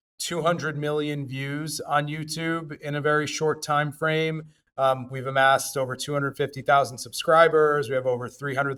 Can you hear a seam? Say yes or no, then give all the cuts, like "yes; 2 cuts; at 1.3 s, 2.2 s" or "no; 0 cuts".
no; 0 cuts